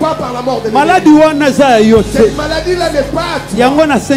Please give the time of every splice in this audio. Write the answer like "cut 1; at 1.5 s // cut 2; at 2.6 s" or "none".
none